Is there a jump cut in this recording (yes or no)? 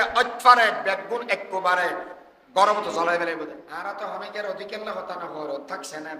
yes